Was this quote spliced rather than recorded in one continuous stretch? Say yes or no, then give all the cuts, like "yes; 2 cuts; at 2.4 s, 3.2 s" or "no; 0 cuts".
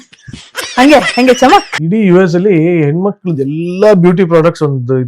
yes; 1 cut; at 1.8 s